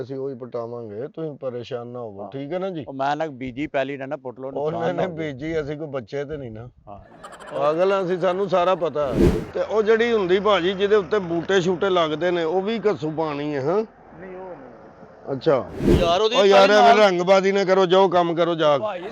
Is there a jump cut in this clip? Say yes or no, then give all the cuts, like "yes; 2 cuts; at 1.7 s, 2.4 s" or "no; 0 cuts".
yes; 2 cuts; at 9.2 s, 15.9 s